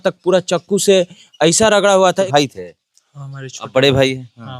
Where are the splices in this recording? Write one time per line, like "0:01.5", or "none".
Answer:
0:02.3